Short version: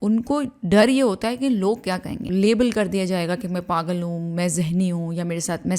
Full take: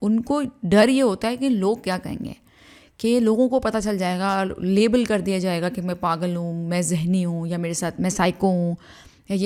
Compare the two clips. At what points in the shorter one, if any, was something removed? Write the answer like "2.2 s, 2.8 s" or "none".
2.2 s

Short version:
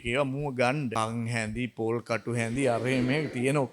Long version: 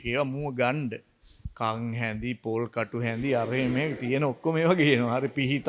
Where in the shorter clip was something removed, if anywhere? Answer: 0.9 s

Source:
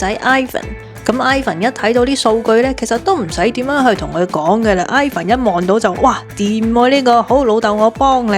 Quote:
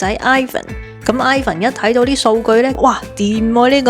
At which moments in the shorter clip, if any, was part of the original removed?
2.8 s

